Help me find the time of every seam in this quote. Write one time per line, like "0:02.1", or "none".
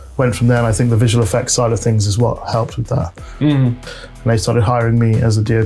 0:03.9